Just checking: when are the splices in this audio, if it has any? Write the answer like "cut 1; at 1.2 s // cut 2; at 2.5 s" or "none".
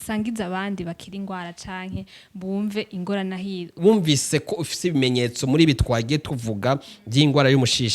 cut 1; at 3.7 s